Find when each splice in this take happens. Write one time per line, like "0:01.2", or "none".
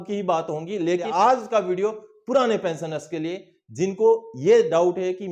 0:01.0